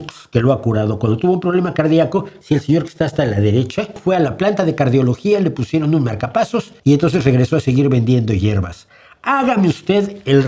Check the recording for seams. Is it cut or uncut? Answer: cut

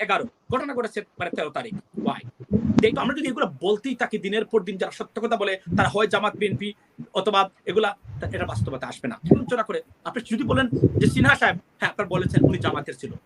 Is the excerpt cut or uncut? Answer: cut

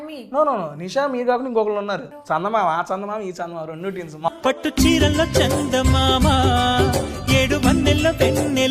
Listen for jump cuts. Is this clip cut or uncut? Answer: cut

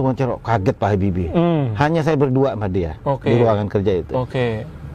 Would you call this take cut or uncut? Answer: uncut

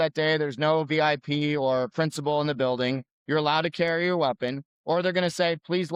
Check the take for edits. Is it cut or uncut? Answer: uncut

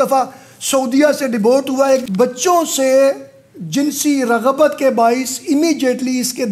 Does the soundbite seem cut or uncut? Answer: cut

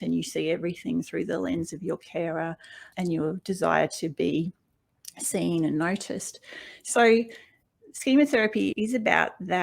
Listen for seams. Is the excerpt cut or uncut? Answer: cut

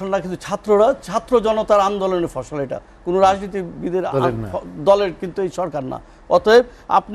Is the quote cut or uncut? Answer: uncut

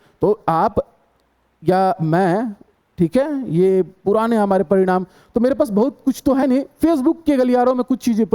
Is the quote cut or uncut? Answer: uncut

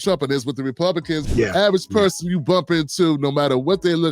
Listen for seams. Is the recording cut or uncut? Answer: cut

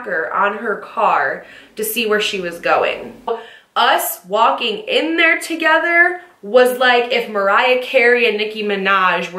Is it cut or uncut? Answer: cut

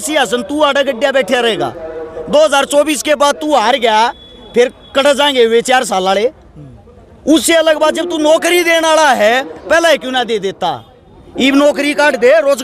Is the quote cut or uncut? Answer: uncut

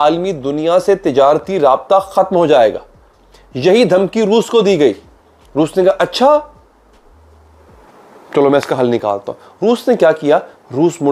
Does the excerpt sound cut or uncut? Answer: uncut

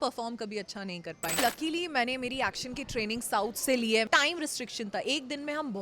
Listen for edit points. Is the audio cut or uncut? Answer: cut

